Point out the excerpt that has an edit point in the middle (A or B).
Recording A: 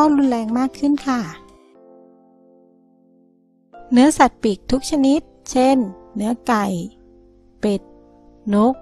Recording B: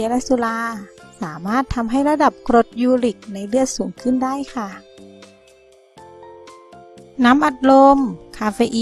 A